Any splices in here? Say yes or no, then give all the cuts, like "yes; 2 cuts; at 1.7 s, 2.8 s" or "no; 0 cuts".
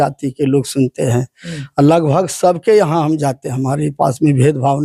no; 0 cuts